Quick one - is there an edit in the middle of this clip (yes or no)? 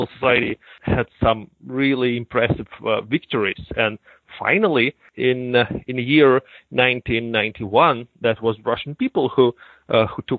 no